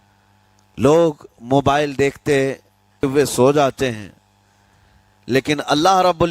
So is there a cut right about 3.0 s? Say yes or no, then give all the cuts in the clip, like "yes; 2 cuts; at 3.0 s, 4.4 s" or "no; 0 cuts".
yes; 1 cut; at 3.0 s